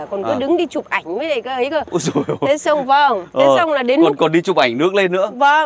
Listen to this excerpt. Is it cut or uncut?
uncut